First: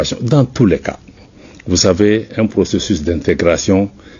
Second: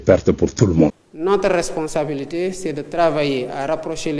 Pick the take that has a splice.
second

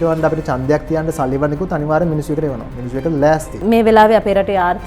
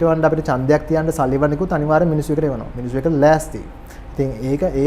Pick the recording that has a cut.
first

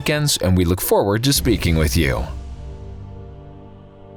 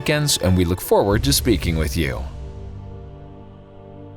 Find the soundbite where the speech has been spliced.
second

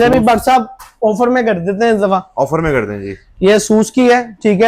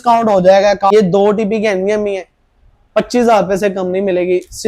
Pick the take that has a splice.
second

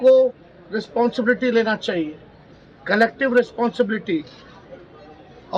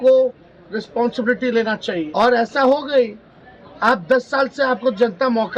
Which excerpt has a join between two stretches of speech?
second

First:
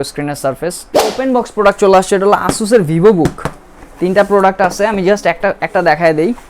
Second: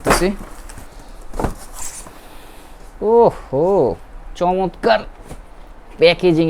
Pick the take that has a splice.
first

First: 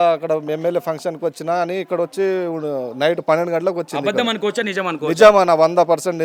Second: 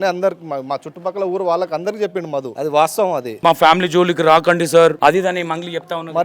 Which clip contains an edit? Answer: second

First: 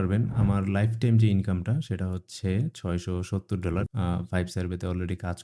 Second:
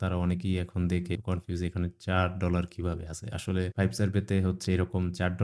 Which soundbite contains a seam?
first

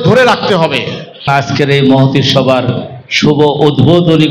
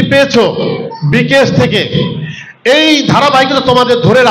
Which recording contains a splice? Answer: first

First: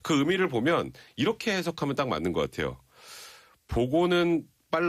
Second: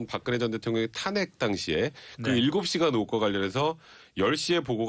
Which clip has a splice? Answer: first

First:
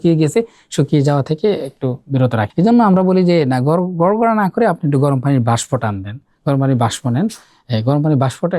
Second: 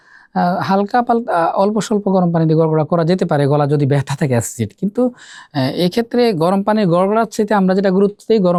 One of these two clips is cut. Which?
first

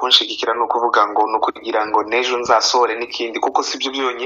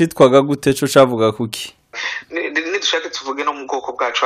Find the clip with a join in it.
second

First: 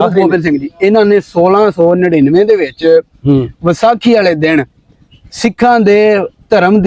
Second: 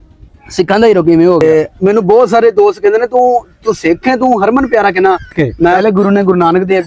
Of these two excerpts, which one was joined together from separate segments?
second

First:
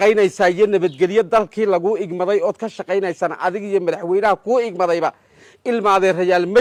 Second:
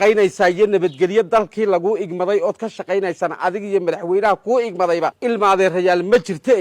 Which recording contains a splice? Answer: second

